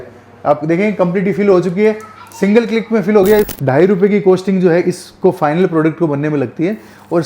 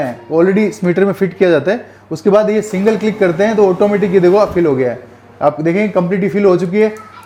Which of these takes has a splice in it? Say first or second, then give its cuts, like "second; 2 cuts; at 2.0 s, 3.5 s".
first; 1 cut; at 3.5 s